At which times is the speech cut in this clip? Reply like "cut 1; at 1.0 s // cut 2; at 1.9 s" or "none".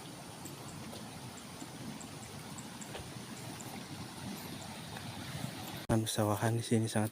cut 1; at 5.9 s